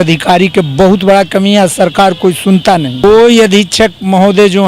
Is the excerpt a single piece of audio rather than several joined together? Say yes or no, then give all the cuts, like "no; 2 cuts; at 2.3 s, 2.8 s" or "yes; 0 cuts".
no; 1 cut; at 2.9 s